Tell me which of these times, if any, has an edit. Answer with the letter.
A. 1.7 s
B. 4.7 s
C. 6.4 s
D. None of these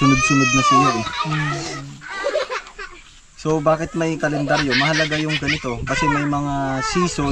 A